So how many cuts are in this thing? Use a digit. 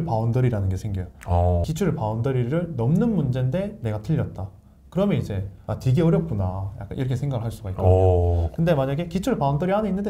2